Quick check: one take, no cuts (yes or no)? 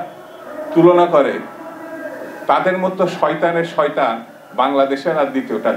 yes